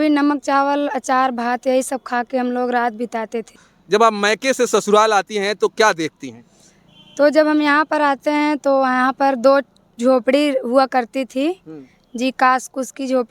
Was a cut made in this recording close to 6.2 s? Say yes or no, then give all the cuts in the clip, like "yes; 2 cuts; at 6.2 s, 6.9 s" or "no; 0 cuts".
no; 1 cut; at 3.8 s